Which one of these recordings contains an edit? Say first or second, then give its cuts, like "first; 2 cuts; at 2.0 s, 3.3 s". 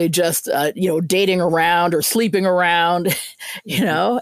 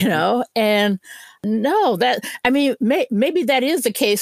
second; 1 cut; at 1.4 s